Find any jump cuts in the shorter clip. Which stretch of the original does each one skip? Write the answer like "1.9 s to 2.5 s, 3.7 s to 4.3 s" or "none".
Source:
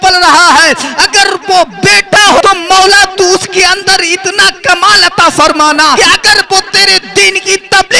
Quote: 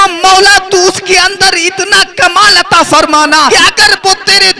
none